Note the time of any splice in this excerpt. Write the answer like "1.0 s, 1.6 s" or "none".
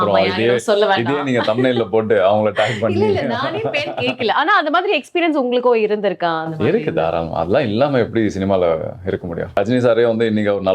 9.5 s